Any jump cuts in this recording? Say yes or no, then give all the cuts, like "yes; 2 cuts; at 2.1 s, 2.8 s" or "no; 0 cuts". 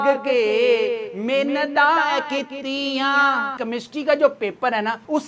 yes; 1 cut; at 3.6 s